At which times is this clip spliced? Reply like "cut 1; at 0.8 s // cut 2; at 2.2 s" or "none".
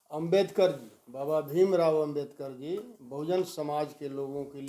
none

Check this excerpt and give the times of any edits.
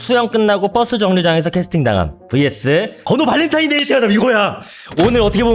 cut 1; at 2.9 s

